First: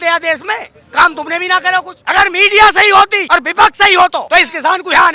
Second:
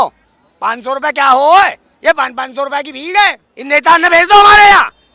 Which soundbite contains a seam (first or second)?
first